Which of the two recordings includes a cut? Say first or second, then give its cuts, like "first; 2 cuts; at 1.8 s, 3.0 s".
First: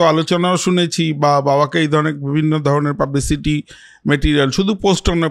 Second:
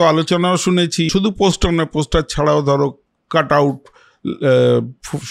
second; 1 cut; at 1.1 s